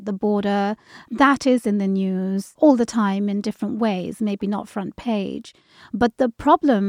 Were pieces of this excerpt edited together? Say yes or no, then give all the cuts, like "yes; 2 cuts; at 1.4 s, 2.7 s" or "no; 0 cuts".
yes; 2 cuts; at 1.0 s, 2.5 s